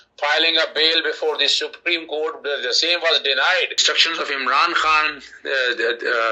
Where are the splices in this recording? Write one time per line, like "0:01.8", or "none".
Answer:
0:03.8